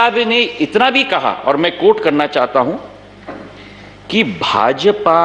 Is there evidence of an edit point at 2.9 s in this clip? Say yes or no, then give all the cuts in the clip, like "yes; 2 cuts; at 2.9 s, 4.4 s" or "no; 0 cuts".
no; 0 cuts